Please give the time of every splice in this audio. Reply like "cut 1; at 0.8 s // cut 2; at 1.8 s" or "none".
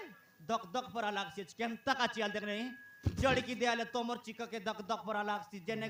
none